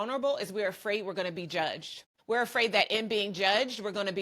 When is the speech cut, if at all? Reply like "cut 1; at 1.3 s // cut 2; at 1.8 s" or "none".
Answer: cut 1; at 2.1 s

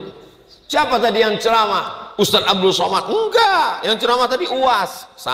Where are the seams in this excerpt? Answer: none

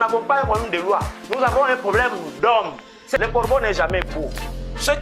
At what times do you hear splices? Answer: cut 1; at 3.2 s

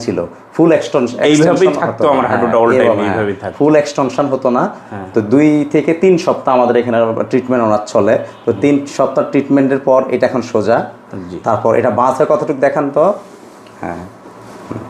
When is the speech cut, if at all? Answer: none

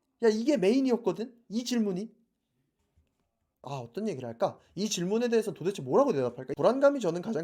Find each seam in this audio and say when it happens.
cut 1; at 3.6 s // cut 2; at 6.4 s

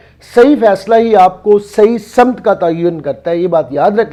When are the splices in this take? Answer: none

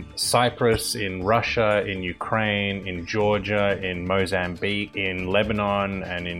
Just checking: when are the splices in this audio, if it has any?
cut 1; at 4.9 s

